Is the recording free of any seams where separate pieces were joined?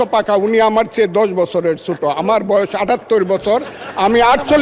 yes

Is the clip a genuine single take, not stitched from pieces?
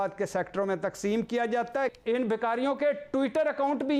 no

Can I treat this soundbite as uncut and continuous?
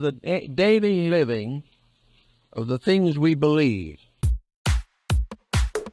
no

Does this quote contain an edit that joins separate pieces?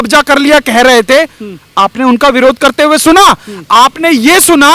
no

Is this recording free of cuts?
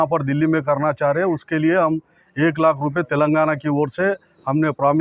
yes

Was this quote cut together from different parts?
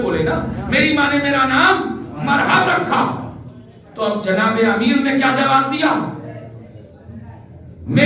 no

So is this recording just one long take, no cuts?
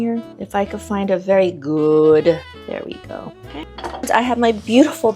no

